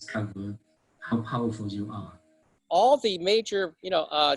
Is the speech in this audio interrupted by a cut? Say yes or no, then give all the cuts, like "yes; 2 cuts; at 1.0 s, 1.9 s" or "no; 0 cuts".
yes; 1 cut; at 2.5 s